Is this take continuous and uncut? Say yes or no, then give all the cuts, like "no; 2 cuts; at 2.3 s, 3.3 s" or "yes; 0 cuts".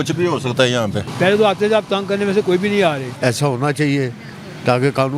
no; 2 cuts; at 1.0 s, 3.1 s